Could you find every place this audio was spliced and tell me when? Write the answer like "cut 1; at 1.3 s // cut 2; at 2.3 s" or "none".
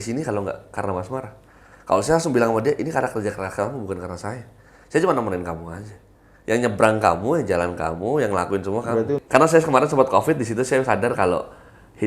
cut 1; at 9.2 s